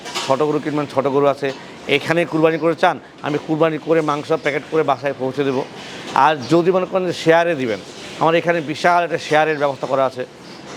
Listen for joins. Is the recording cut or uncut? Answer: uncut